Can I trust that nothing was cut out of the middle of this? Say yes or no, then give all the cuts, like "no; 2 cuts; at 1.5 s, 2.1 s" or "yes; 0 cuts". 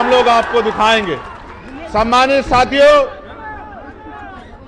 yes; 0 cuts